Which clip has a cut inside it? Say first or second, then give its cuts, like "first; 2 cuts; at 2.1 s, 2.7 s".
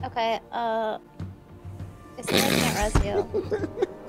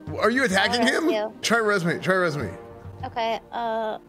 second; 1 cut; at 1.4 s